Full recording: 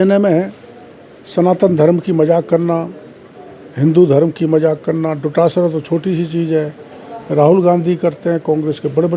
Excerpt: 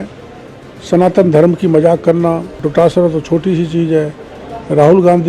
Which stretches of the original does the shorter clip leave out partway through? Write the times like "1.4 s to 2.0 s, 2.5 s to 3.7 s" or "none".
3.1 s to 5.2 s